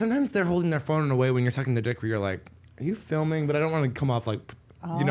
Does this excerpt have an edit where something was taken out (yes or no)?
no